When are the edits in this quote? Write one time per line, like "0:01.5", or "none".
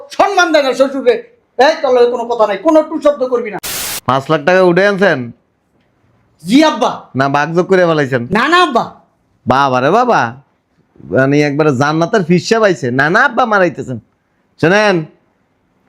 0:03.6